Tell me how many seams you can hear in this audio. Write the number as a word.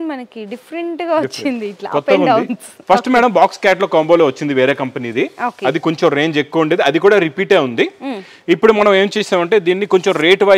zero